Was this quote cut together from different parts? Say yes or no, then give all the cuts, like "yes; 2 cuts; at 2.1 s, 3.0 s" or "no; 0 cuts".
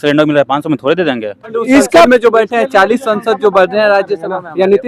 yes; 1 cut; at 1.6 s